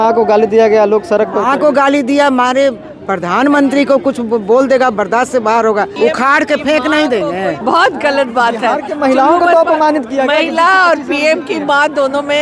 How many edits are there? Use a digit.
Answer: 2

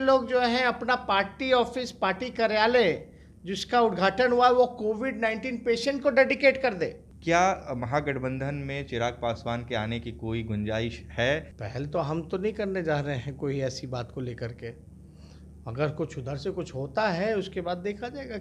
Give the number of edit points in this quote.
2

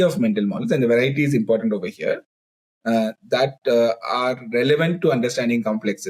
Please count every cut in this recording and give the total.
0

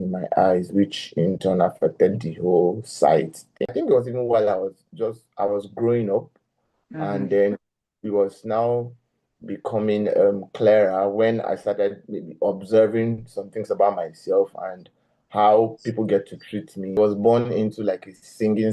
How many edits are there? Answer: 2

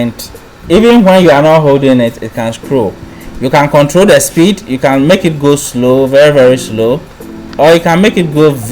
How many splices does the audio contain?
1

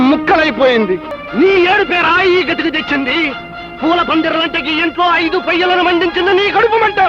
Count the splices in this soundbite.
1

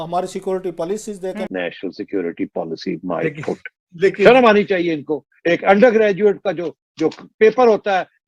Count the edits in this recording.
1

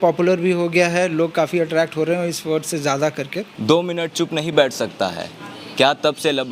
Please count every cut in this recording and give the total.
1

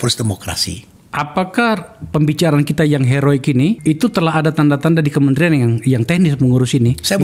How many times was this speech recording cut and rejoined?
1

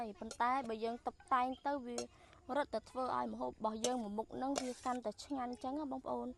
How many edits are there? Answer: 0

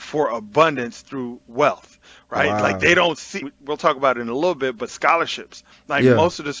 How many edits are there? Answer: 1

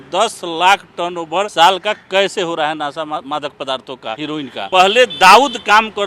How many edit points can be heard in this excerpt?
2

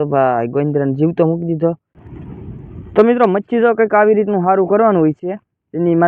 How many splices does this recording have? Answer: 1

